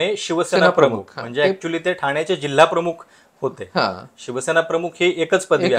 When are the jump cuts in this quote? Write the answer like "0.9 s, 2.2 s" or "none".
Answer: none